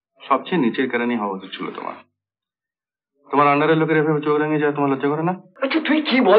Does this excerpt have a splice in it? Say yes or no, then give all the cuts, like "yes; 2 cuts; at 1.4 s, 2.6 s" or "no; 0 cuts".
yes; 1 cut; at 5.5 s